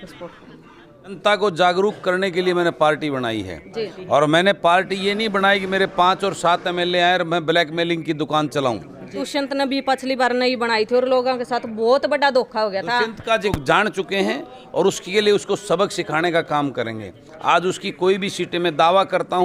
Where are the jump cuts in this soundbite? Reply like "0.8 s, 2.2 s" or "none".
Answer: 1.1 s, 9.2 s, 13.6 s